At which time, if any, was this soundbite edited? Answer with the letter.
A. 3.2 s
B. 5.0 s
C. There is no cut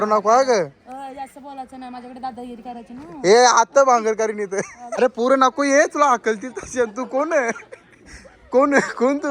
B